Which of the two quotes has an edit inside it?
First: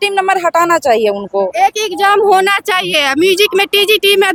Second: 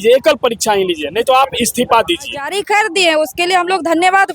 second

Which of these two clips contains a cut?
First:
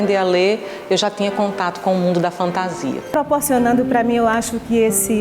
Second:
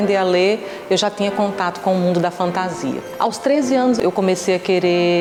first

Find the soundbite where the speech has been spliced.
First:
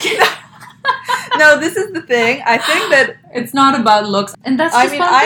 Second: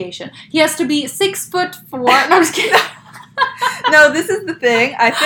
first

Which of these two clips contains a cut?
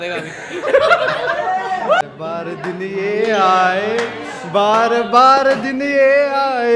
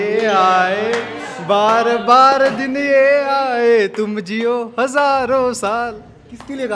first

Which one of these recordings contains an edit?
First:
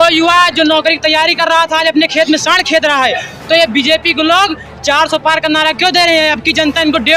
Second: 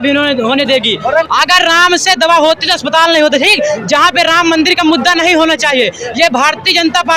second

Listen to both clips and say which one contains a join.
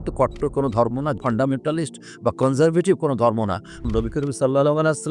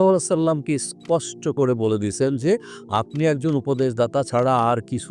first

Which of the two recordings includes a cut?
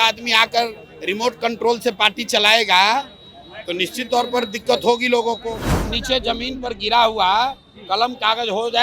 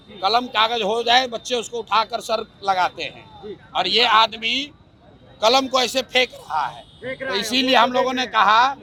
first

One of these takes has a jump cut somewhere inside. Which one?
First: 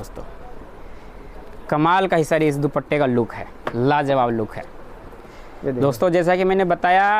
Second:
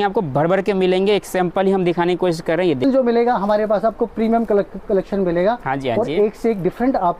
second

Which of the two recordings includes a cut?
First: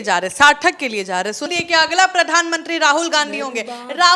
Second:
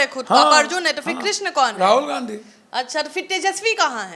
first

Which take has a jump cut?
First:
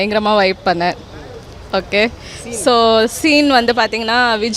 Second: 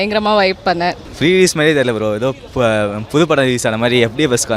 second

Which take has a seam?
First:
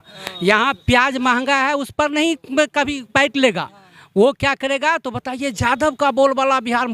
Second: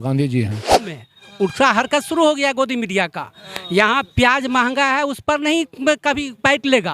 second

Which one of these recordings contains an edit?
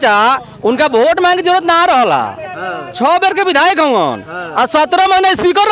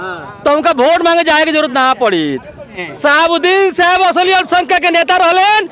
second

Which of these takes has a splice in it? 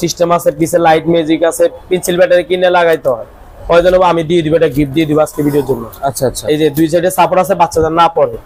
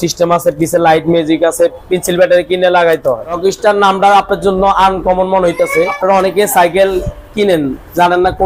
second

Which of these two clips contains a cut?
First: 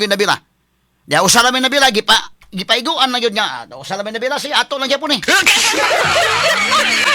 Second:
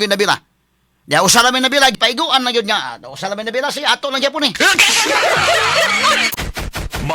second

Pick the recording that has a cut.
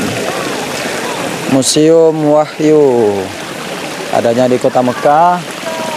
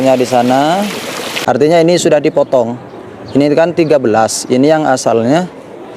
second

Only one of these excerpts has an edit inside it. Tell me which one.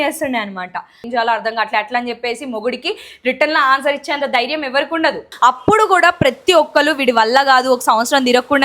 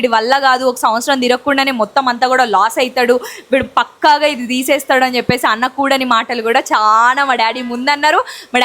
first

